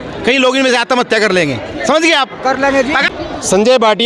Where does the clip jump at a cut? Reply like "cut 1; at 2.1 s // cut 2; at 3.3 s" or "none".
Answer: cut 1; at 3.0 s